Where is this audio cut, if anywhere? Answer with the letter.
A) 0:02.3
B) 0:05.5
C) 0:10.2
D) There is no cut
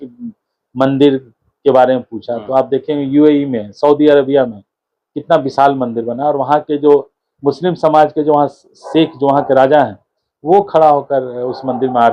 D